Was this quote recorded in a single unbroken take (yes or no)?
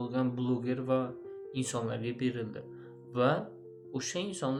yes